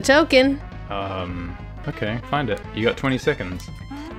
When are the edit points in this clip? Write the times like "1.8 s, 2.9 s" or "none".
1.8 s